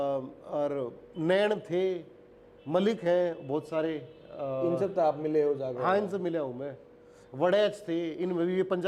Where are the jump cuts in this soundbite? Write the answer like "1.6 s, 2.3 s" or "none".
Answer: none